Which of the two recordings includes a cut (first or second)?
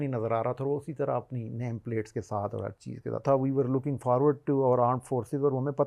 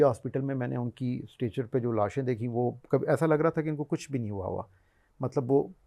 first